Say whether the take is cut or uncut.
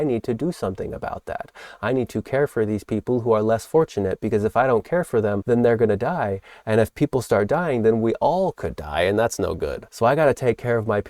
cut